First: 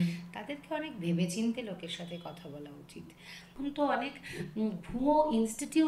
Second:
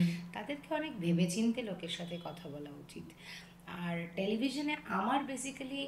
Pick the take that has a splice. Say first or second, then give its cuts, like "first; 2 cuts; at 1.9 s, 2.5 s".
first; 1 cut; at 3.5 s